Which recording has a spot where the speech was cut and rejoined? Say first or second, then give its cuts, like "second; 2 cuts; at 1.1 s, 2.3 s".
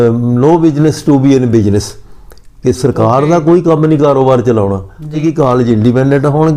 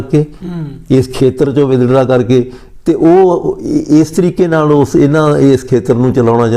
first; 1 cut; at 5.2 s